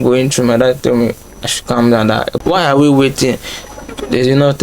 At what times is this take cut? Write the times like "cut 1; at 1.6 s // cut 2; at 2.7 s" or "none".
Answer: cut 1; at 2.3 s